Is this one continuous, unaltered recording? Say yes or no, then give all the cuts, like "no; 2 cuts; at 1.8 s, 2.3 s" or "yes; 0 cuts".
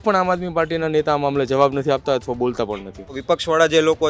no; 1 cut; at 3.2 s